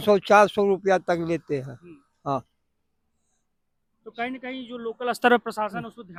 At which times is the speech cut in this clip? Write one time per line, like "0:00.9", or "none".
none